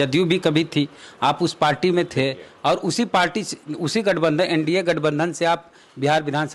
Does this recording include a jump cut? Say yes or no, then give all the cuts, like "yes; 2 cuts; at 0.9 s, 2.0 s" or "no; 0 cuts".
no; 0 cuts